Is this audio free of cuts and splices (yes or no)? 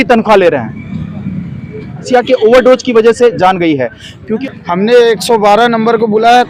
no